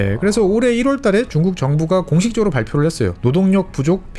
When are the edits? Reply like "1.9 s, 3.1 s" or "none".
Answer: none